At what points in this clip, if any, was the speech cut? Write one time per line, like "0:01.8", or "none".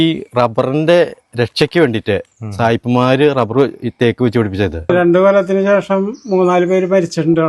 0:04.9